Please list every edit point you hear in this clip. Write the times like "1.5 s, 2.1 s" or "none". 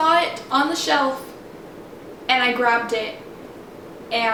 none